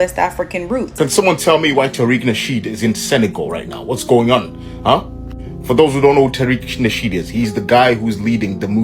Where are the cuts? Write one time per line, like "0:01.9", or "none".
0:00.9